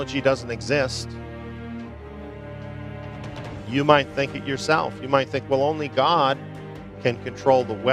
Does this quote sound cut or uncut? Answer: uncut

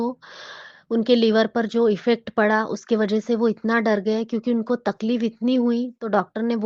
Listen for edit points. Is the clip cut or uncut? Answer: uncut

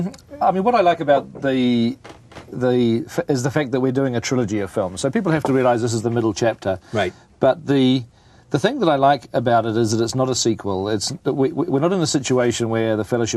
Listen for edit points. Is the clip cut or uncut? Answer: cut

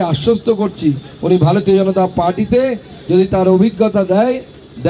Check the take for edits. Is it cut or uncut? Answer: uncut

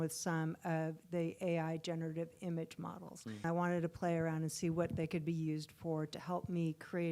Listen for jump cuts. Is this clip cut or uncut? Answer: cut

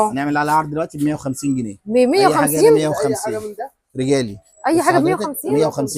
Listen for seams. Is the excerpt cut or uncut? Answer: uncut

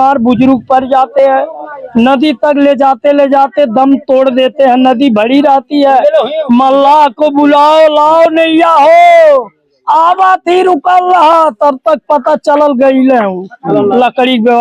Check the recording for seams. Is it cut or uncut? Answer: uncut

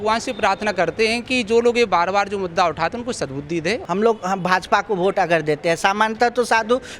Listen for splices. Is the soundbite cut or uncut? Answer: cut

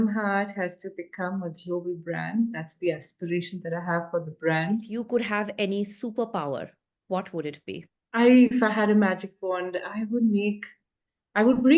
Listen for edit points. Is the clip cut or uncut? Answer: cut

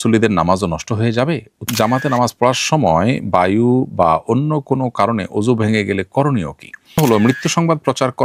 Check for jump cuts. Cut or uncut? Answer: cut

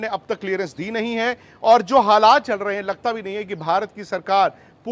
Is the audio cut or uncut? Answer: uncut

